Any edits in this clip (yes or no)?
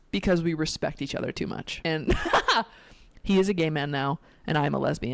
yes